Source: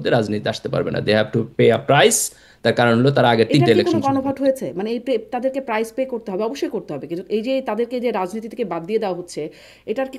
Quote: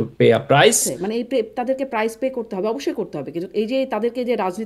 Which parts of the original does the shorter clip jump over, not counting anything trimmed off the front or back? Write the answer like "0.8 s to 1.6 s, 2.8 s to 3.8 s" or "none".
2.3 s to 4.7 s

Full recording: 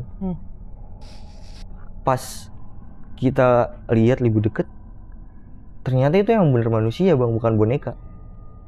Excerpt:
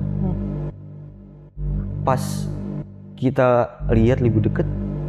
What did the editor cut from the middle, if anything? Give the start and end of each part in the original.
none

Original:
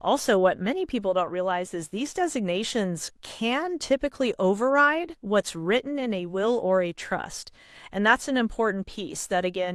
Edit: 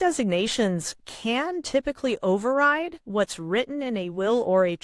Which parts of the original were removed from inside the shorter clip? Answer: none

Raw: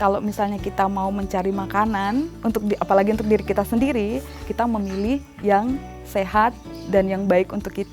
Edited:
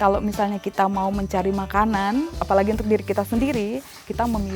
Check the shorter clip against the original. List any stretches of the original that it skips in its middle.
2.4 s to 2.8 s

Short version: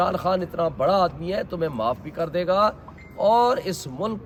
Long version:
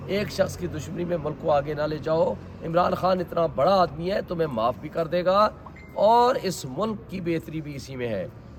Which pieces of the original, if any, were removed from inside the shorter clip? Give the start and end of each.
none

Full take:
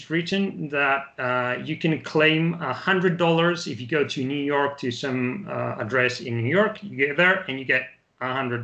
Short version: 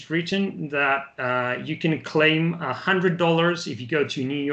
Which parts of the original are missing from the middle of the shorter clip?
none

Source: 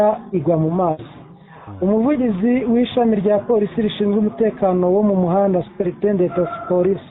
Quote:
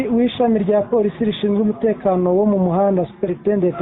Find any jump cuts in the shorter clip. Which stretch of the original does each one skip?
none

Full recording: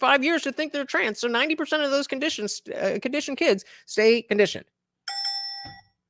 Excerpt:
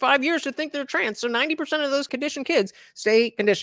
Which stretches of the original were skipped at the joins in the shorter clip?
2.1 s to 3.0 s

